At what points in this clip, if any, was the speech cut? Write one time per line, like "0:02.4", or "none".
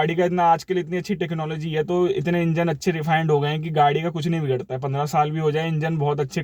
none

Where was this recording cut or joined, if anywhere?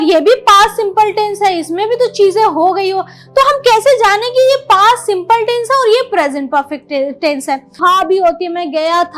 0:07.8

